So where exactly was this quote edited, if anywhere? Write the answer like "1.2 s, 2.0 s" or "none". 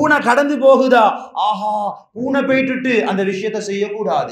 none